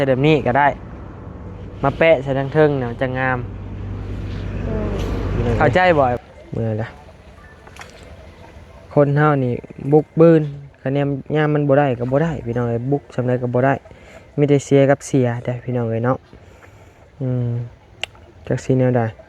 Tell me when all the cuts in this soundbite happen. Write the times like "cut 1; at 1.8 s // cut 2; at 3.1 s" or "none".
cut 1; at 6.2 s